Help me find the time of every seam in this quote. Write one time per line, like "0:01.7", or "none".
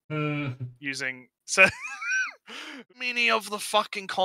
0:02.9